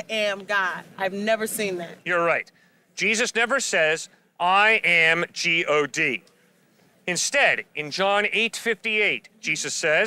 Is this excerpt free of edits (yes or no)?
yes